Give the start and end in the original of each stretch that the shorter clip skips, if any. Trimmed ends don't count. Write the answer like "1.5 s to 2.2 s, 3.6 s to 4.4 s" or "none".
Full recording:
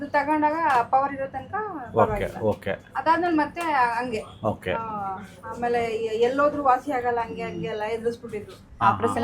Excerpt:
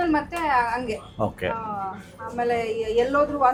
none